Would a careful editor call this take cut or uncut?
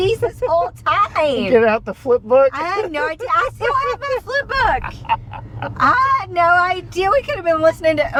uncut